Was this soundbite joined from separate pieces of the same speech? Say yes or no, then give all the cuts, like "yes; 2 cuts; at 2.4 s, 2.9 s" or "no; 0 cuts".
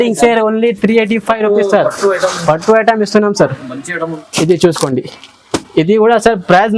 yes; 1 cut; at 4.2 s